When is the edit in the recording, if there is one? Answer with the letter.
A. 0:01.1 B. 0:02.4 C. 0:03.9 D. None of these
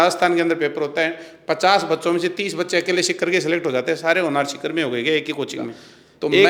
D